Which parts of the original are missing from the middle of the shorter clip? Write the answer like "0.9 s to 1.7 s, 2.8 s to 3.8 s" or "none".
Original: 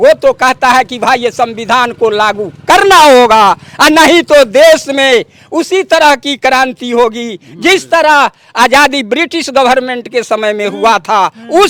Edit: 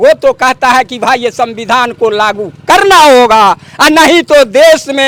none